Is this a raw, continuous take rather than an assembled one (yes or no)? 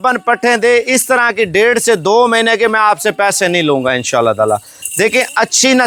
yes